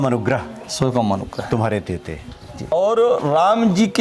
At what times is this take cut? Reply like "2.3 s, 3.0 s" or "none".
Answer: 2.7 s